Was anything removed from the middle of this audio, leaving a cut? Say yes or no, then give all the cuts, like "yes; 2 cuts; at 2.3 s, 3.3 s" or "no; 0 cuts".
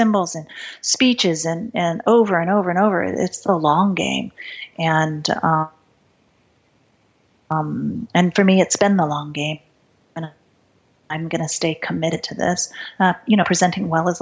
no; 0 cuts